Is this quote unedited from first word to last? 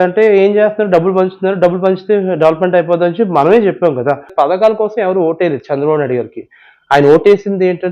no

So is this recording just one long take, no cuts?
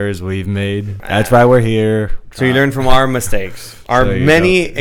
no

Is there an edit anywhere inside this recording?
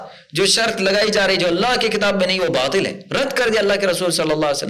no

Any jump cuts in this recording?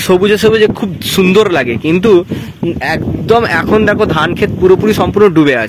no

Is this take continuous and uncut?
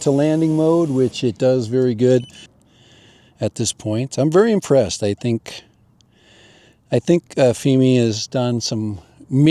no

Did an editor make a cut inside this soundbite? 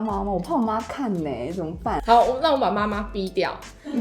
yes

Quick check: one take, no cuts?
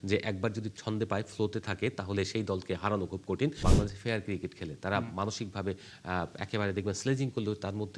no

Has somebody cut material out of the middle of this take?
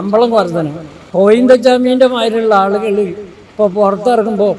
yes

